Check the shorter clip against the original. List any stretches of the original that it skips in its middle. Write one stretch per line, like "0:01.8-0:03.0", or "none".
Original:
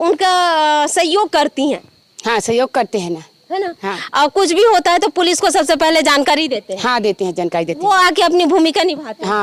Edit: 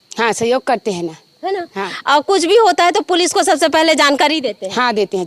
none